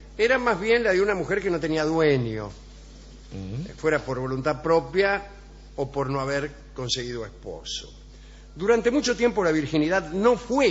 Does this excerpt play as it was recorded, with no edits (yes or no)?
yes